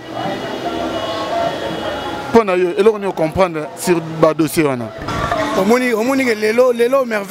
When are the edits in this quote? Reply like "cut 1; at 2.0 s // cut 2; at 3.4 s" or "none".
cut 1; at 5.1 s